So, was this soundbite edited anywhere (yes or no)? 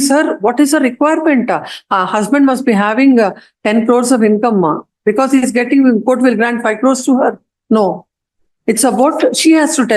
no